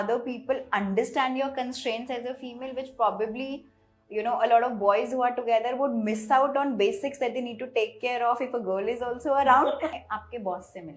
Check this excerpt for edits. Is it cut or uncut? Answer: cut